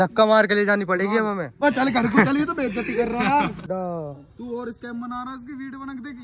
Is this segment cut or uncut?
cut